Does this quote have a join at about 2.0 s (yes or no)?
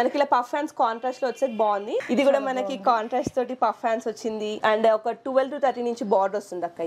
yes